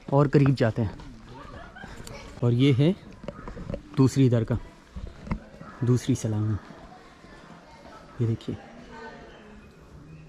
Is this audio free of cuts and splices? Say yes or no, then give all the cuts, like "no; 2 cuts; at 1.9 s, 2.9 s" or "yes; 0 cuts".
no; 1 cut; at 2.4 s